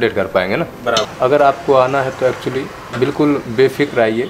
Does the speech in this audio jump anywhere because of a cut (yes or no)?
yes